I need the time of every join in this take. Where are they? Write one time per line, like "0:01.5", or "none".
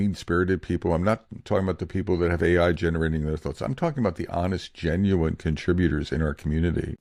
none

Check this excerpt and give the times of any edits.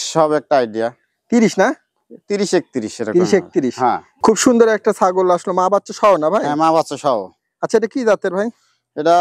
0:04.1

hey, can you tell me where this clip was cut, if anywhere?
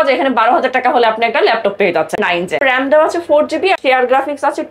0:02.5
0:03.8

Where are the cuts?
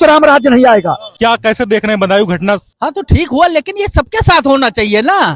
0:01.0
0:02.7

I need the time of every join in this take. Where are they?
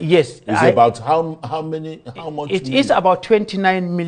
none

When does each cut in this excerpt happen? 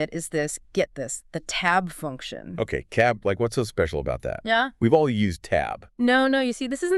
none

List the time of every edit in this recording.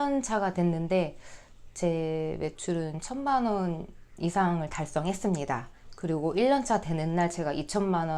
none

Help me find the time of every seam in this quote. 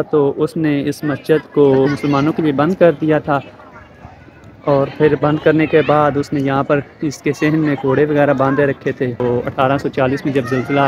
0:01.9
0:09.2

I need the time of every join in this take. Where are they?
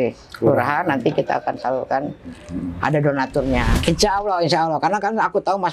0:03.7

